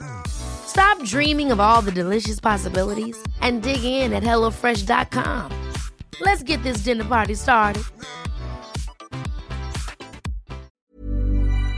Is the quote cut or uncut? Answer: cut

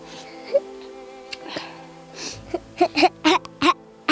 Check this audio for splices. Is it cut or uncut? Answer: uncut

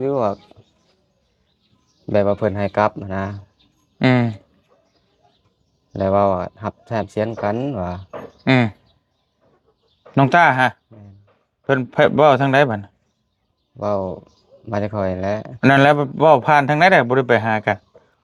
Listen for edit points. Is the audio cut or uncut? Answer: uncut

